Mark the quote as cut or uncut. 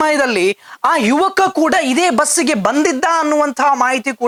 uncut